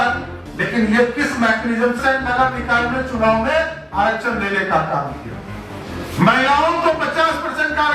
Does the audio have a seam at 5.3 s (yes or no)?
no